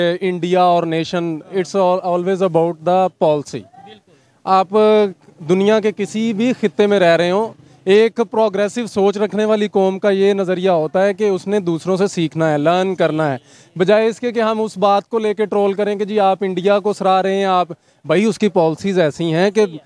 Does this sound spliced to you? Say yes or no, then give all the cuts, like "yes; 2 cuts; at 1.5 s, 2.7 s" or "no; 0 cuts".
no; 0 cuts